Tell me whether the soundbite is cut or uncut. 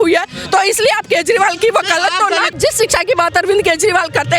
cut